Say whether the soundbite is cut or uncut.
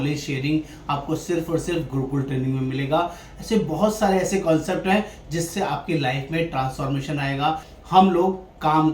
cut